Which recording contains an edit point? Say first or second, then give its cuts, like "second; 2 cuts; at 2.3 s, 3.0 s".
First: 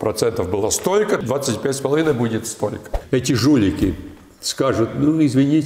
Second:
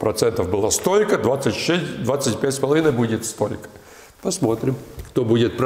first; 2 cuts; at 1.2 s, 2.9 s